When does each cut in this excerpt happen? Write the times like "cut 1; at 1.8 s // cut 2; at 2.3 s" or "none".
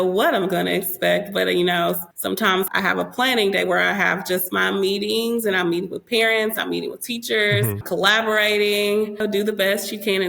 cut 1; at 9.2 s

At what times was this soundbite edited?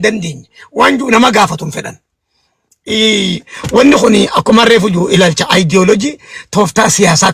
none

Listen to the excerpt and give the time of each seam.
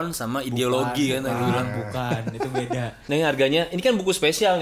cut 1; at 3.0 s

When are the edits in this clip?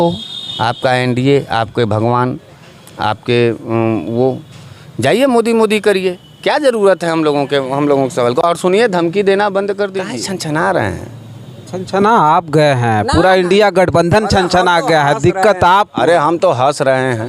cut 1; at 10.0 s

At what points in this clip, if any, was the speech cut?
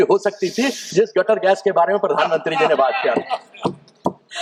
none

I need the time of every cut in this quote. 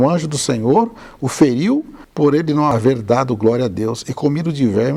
none

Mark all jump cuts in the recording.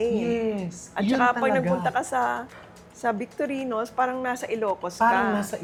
none

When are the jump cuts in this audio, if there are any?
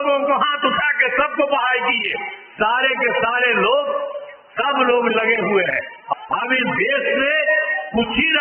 cut 1; at 6.1 s

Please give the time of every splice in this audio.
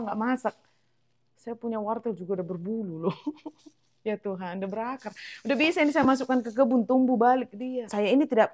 cut 1; at 7.6 s

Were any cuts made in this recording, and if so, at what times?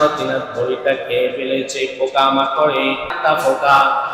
cut 1; at 3.1 s

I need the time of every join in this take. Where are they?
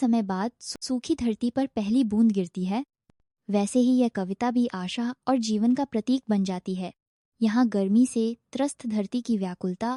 none

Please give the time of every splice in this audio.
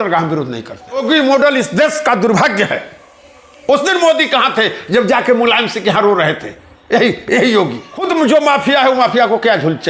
cut 1; at 1.0 s // cut 2; at 8.1 s

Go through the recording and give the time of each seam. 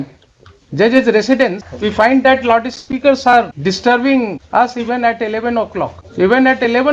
cut 1; at 1.7 s // cut 2; at 3.5 s // cut 3; at 4.4 s // cut 4; at 6.0 s

